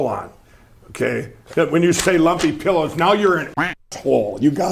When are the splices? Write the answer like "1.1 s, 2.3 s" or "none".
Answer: none

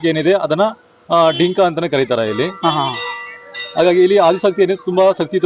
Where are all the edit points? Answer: none

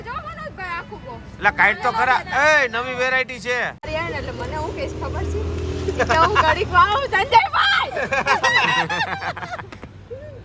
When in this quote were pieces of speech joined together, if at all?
3.9 s

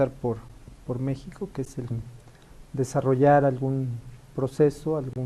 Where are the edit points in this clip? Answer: none

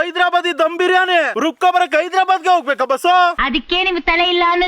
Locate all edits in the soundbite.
1.3 s

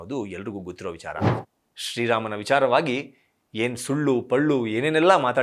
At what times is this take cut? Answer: 1.4 s

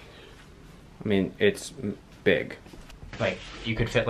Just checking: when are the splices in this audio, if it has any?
2.9 s

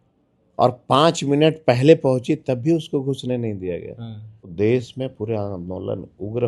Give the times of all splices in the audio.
4.5 s

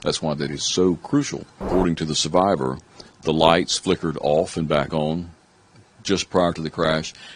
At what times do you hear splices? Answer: 1.7 s

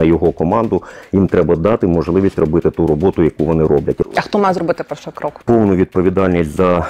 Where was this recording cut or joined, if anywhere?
4.0 s, 5.4 s

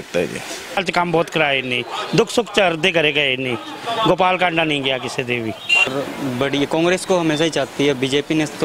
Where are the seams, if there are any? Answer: 0.8 s, 5.9 s

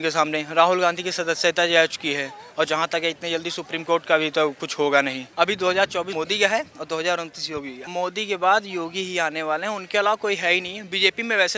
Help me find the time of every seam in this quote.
5.2 s, 7.8 s

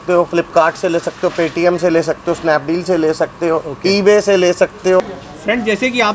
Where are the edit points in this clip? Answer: 5.0 s

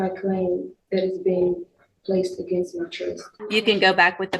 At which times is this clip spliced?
3.3 s

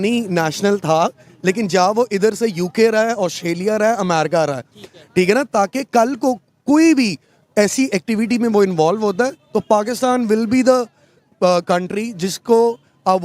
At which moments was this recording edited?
none

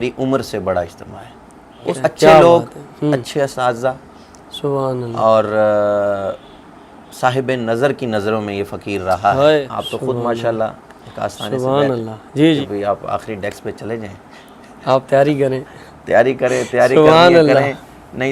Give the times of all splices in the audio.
1.9 s, 9.7 s, 12.6 s

